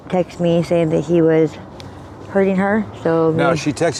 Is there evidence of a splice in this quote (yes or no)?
no